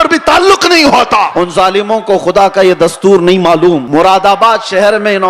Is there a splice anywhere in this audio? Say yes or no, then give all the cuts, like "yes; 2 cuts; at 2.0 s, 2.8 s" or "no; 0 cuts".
yes; 2 cuts; at 1.3 s, 3.8 s